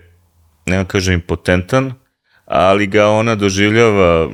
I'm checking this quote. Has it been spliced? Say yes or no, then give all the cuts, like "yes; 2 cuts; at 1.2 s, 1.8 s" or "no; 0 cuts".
no; 0 cuts